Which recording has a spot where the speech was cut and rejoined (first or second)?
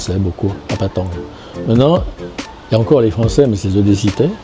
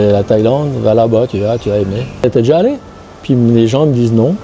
second